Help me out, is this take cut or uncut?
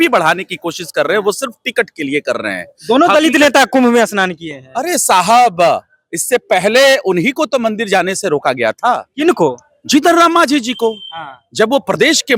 uncut